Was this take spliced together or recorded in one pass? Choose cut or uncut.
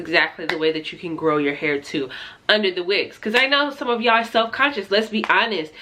uncut